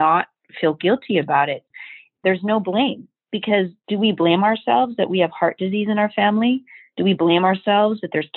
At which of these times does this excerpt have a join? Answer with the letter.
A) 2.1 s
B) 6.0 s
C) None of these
A